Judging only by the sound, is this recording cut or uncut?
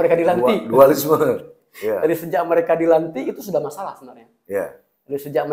uncut